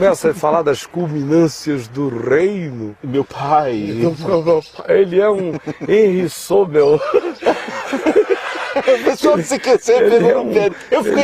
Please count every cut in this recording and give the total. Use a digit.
0